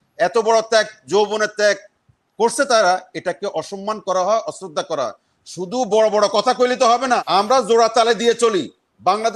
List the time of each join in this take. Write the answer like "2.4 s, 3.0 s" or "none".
7.2 s